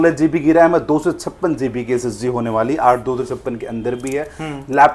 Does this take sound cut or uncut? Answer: uncut